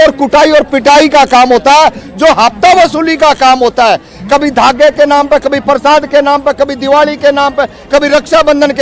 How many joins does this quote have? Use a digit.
0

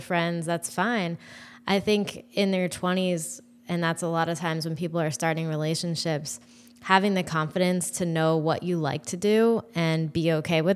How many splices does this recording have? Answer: 0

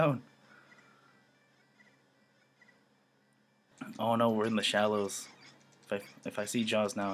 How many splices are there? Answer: 1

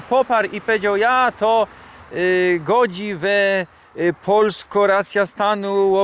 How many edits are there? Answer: 0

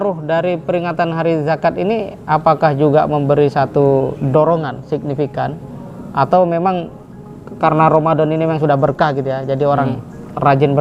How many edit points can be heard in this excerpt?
0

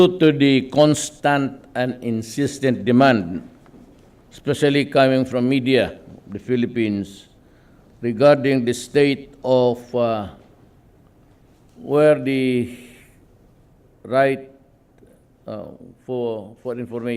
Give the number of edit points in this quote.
0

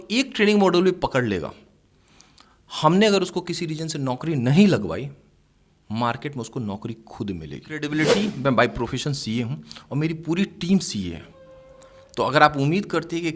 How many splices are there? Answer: 1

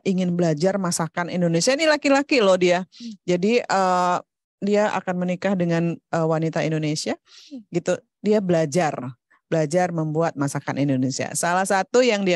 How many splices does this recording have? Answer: 0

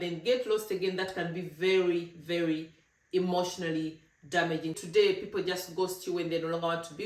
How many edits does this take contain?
1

